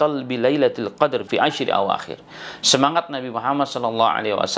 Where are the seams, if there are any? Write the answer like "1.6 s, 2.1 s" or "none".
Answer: 1.3 s